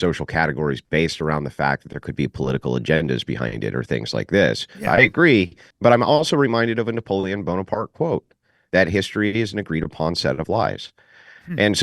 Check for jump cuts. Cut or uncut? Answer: cut